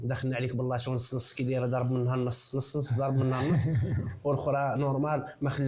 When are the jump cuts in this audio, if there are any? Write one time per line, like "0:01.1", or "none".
none